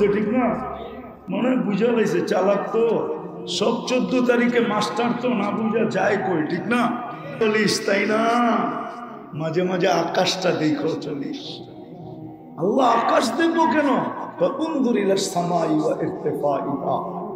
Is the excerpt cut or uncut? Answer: cut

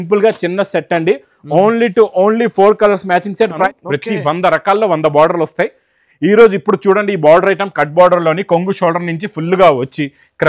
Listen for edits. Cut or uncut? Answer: cut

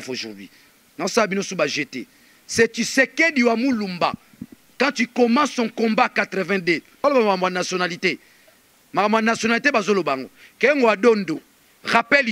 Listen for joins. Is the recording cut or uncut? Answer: cut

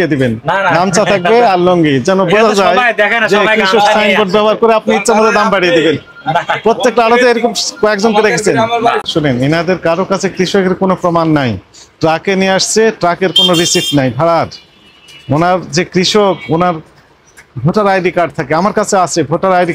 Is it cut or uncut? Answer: cut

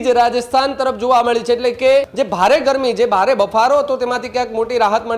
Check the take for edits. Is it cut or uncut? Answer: cut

